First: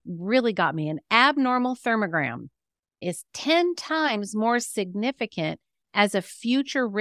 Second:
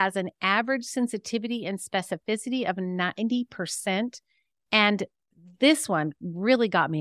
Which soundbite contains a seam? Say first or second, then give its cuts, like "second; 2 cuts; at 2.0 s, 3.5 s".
first; 1 cut; at 3.0 s